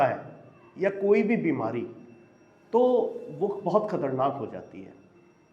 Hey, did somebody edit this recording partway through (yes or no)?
yes